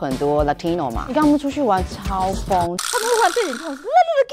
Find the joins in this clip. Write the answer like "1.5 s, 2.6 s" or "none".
1.1 s